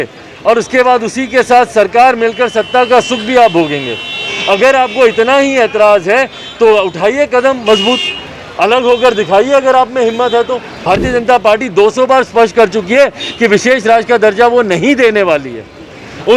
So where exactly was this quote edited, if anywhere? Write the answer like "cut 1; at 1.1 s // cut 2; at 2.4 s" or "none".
cut 1; at 10.8 s